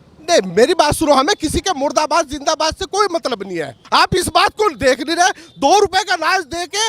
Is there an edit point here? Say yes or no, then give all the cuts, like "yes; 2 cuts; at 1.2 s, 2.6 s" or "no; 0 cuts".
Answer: yes; 1 cut; at 3.8 s